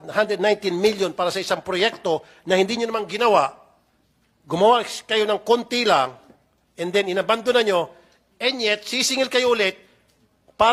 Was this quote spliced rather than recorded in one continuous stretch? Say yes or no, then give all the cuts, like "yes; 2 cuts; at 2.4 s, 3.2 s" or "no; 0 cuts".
no; 0 cuts